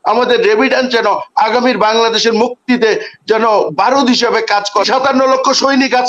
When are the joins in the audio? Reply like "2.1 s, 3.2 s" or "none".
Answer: 4.9 s

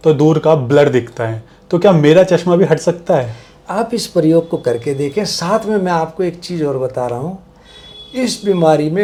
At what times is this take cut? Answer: none

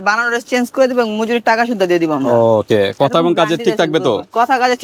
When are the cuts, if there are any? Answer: none

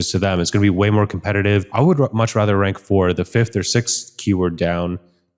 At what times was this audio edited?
1.6 s

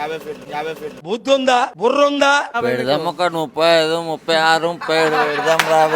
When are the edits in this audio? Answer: 2.5 s

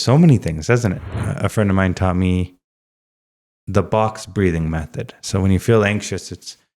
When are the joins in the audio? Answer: 1.1 s

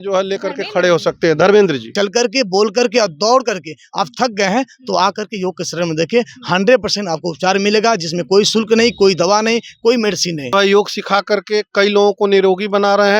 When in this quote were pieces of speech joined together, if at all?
1.9 s, 10.5 s

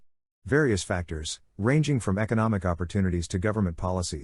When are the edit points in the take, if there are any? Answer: 1.1 s

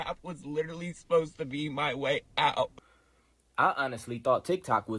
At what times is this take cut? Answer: 2.8 s

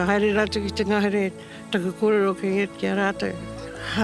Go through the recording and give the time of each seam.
none

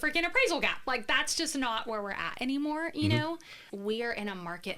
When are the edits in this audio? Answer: 3.6 s

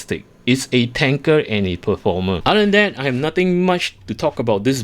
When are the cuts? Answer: 2.4 s

